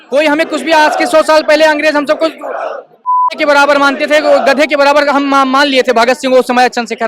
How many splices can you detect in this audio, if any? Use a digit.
0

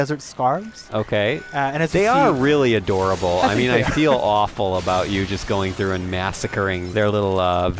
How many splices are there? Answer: 1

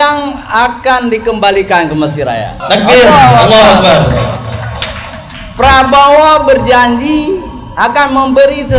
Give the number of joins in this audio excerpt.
1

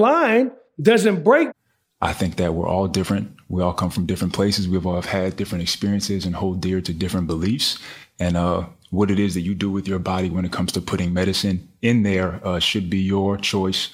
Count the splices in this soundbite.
1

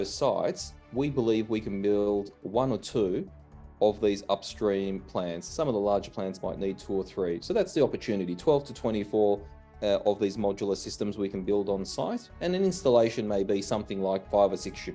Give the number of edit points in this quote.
0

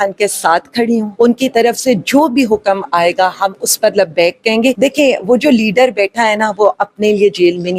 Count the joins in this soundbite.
2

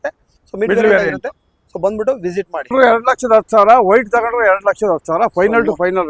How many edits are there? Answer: 1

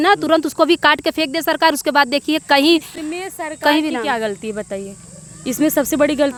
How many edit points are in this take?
0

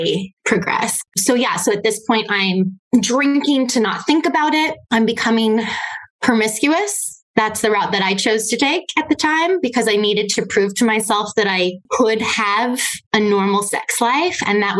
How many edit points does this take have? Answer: 1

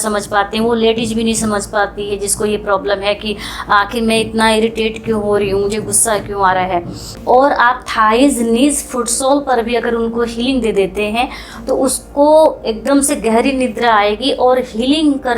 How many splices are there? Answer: 1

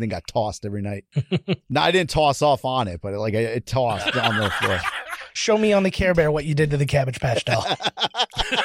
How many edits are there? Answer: 1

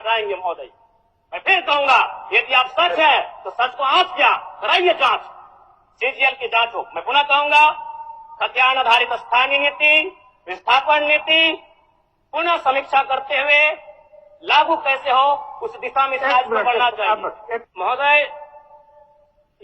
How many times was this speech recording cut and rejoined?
1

